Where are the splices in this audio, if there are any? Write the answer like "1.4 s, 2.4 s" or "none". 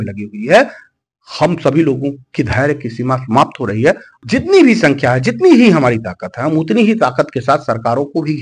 4.2 s